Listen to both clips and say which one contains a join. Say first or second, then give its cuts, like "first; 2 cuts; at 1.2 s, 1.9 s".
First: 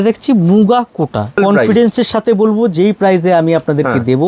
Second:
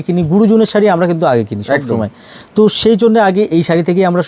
first; 1 cut; at 1.4 s